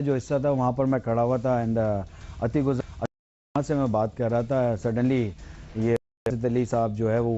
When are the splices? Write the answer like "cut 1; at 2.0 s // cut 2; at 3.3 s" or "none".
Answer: none